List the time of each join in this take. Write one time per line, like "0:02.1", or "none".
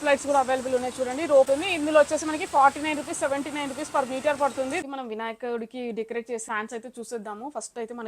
0:01.5
0:04.8
0:06.4